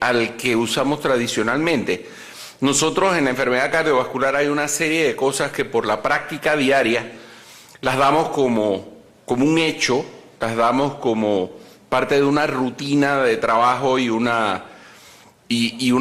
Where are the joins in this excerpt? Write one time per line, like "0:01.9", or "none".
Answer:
0:11.5